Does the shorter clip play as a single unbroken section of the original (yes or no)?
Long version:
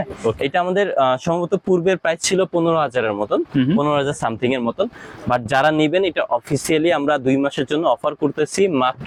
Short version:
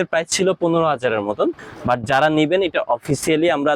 no